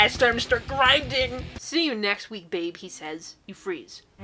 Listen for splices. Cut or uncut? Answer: cut